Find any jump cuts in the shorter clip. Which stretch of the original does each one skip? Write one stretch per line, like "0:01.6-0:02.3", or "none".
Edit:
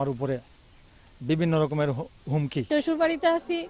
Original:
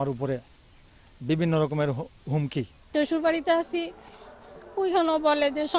0:02.6-0:02.8